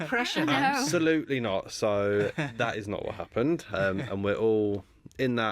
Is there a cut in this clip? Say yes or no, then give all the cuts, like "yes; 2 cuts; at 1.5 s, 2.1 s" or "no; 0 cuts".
no; 0 cuts